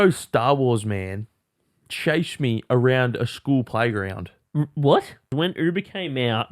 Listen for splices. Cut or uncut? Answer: cut